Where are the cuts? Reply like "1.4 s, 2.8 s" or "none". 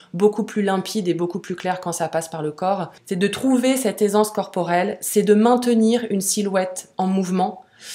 3.0 s